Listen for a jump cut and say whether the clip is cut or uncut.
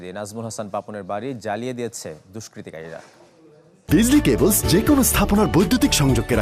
uncut